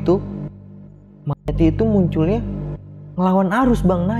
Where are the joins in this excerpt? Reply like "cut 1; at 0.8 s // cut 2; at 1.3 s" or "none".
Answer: none